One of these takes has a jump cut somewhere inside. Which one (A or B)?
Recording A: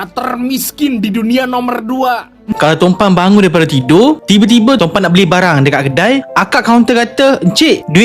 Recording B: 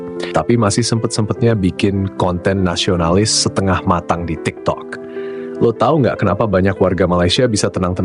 A